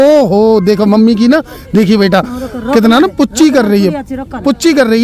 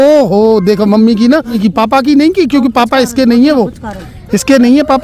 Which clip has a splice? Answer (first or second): second